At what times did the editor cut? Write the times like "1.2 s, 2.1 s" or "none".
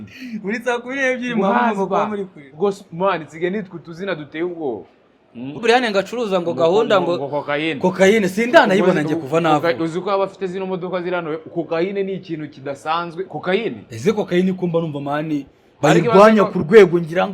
5.6 s